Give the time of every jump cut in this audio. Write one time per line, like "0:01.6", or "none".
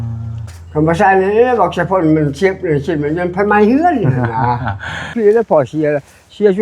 0:05.0